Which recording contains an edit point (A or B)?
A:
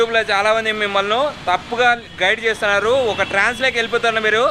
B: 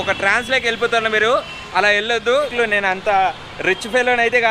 B